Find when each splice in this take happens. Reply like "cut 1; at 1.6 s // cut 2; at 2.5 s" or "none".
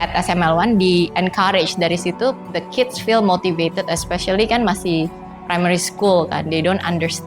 cut 1; at 2.5 s